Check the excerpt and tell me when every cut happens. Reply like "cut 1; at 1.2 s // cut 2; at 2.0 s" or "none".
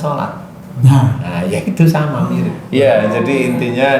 none